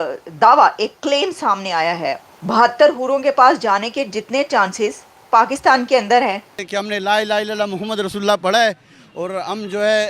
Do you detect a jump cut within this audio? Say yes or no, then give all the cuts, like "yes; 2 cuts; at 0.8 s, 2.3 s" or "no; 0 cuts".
yes; 2 cuts; at 2.2 s, 6.5 s